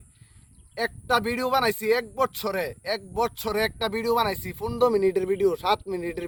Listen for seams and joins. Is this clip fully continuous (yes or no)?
yes